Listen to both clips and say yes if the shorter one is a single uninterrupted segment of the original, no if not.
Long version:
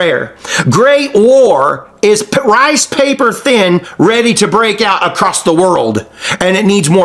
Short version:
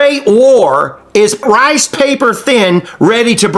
no